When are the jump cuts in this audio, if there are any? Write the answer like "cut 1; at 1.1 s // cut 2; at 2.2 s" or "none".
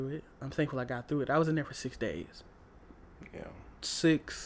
cut 1; at 2.7 s